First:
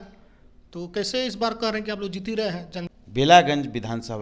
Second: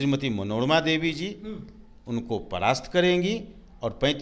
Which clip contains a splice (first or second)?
first